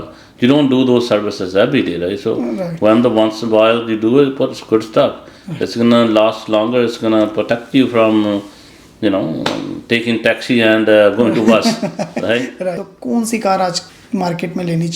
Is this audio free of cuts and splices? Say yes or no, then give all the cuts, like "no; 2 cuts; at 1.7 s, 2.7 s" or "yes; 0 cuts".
no; 2 cuts; at 12.8 s, 13.9 s